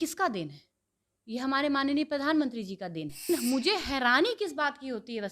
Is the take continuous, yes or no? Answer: no